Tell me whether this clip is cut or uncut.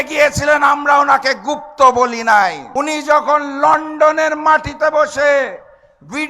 cut